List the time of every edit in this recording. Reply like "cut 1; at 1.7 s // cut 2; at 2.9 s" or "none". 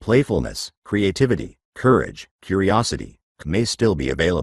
cut 1; at 3.2 s